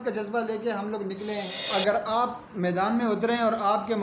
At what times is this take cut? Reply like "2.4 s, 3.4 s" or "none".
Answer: 1.5 s